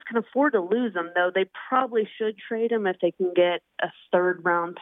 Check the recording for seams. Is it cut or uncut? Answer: uncut